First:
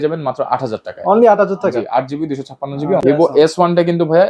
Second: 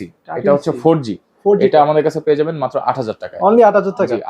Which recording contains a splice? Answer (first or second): first